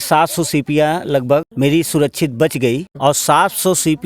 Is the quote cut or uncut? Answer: cut